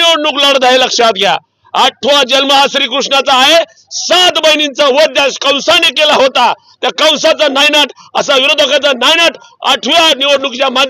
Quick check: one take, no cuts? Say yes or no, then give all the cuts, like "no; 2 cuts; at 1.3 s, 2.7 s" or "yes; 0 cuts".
yes; 0 cuts